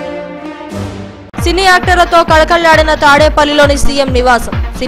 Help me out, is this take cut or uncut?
cut